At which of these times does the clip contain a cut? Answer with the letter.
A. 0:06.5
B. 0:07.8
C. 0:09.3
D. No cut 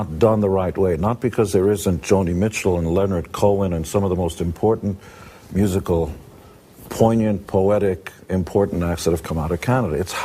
C